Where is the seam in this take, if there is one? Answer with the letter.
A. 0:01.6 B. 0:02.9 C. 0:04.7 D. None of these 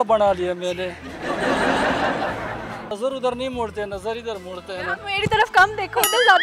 B